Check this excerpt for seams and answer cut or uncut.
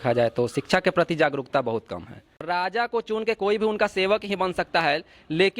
cut